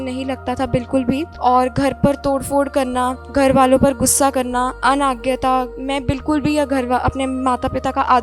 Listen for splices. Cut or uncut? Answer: cut